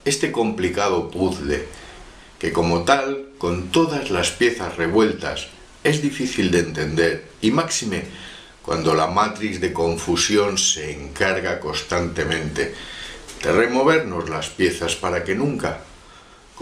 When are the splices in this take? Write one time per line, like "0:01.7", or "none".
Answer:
0:13.9